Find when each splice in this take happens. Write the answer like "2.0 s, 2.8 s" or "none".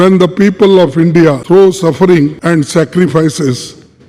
1.4 s, 2.4 s